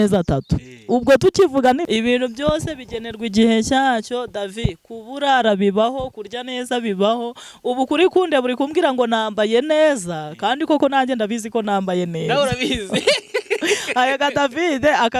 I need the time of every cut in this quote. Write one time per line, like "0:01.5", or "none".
0:01.8